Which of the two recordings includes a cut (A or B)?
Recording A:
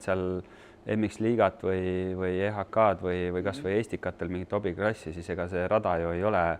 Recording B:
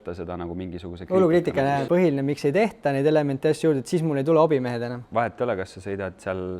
B